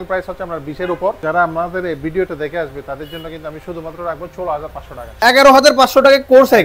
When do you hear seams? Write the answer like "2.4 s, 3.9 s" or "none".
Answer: 1.2 s, 5.2 s